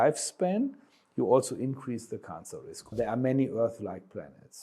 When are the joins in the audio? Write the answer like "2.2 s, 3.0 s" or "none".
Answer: 2.9 s